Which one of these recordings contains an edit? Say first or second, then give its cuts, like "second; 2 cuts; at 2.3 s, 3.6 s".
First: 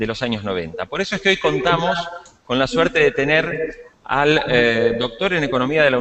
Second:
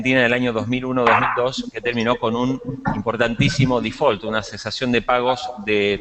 second; 1 cut; at 3.9 s